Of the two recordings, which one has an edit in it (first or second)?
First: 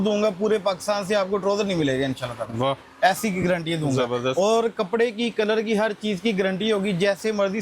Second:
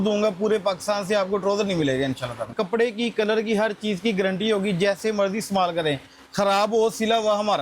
second